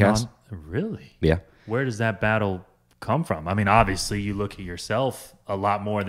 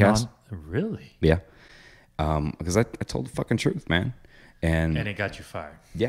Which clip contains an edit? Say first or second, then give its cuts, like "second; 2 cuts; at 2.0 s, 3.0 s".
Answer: first; 1 cut; at 1.5 s